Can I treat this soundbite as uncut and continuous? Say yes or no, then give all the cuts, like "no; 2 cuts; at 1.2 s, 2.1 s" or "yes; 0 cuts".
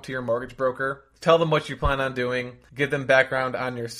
no; 2 cuts; at 1.0 s, 2.6 s